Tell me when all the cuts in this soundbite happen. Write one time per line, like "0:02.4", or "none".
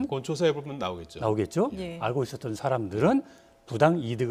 none